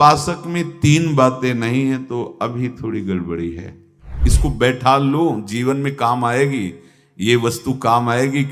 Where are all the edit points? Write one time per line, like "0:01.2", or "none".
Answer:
0:04.2